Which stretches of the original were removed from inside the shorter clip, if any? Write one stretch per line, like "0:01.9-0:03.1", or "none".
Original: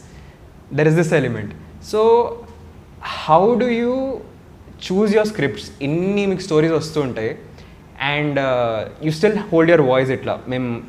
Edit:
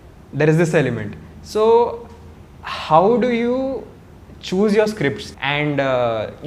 0:05.7-0:07.9